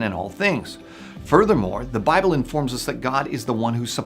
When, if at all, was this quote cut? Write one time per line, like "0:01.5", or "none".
0:00.9